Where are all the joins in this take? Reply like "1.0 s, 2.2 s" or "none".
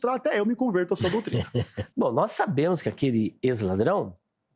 1.8 s